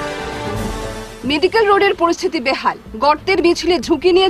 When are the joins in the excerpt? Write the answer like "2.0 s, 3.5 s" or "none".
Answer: 0.9 s